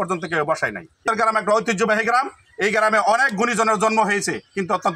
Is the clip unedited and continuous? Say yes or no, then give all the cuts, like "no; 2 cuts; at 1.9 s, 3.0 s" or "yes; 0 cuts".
no; 1 cut; at 1.1 s